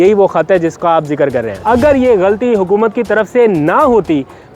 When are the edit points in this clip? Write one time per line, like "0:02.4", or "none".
0:01.5